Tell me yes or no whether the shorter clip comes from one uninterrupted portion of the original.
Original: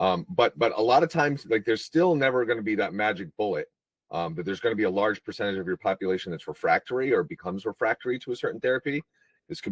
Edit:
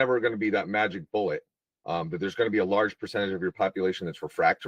yes